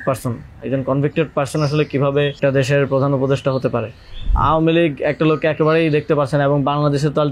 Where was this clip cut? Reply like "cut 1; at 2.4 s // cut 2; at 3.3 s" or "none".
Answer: cut 1; at 2.4 s // cut 2; at 4.3 s